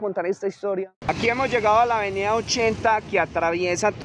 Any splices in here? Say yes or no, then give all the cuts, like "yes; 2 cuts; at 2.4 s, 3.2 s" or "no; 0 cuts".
yes; 1 cut; at 1.0 s